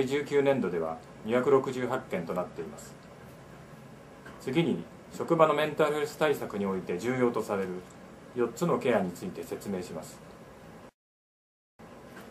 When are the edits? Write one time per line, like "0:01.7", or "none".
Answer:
none